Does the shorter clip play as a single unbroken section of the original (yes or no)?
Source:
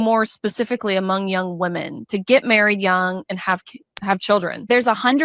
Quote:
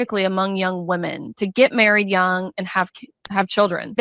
yes